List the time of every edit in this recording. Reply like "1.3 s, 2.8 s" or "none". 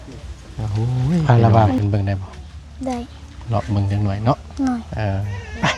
1.3 s